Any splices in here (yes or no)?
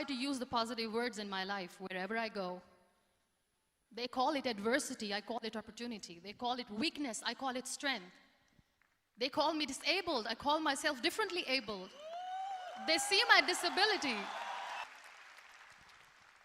yes